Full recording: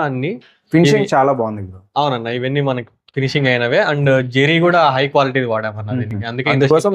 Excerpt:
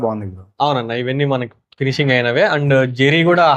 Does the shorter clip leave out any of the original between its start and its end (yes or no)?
no